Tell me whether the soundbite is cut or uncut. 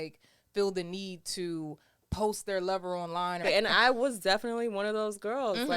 cut